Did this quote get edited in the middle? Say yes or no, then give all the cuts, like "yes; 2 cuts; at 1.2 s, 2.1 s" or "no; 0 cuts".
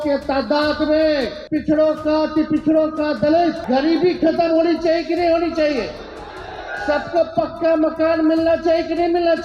yes; 2 cuts; at 1.4 s, 3.6 s